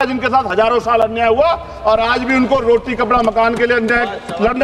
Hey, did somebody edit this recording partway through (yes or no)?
no